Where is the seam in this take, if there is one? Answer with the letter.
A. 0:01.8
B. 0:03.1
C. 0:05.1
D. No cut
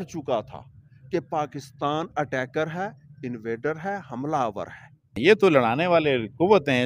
C